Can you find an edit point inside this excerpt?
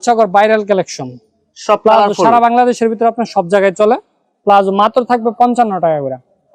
no; 0 cuts

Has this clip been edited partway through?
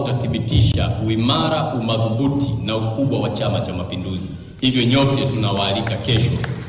no; 0 cuts

